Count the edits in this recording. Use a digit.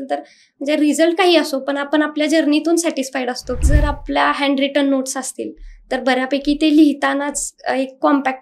1